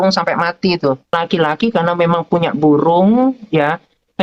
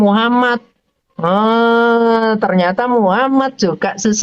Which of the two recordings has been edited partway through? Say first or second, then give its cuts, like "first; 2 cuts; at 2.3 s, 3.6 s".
first; 1 cut; at 1.1 s